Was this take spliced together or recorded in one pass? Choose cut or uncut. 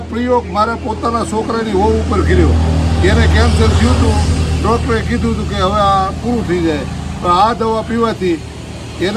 uncut